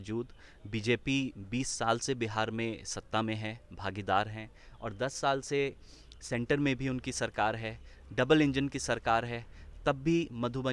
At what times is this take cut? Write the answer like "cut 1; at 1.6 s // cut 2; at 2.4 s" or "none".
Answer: none